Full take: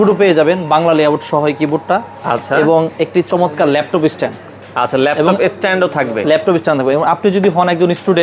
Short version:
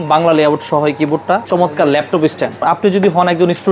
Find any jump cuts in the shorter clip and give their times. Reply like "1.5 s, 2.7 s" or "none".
1.5 s, 2.6 s